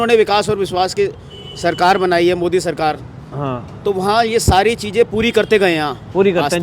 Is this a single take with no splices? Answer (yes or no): yes